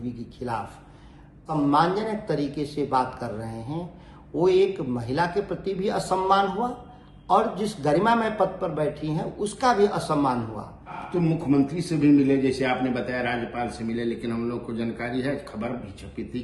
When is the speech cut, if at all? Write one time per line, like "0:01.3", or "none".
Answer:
0:01.4
0:11.0